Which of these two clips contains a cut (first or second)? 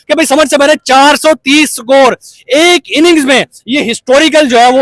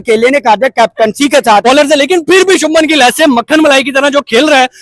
second